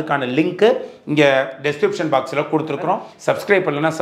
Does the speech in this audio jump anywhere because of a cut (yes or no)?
yes